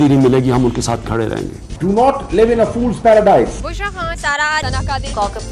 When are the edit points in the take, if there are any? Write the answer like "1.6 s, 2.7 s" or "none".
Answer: none